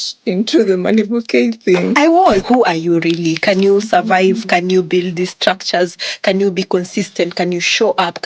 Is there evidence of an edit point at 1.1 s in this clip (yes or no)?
no